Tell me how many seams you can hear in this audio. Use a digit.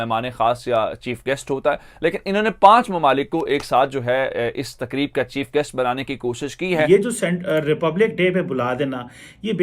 1